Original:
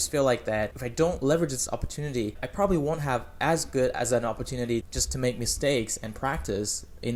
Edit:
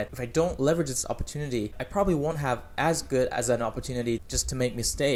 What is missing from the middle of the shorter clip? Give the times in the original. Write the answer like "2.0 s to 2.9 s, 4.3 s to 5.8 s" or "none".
none